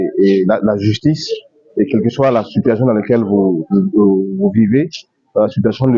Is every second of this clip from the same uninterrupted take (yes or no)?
yes